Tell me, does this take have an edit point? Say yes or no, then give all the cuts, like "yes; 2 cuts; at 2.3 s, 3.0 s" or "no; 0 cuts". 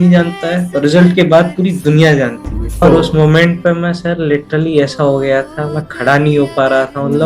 yes; 1 cut; at 2.8 s